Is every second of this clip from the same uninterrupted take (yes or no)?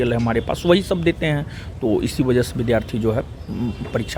yes